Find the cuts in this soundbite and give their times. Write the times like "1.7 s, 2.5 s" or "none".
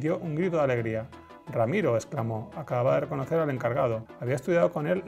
4.1 s